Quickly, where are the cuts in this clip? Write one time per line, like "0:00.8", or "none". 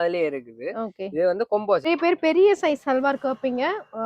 0:01.9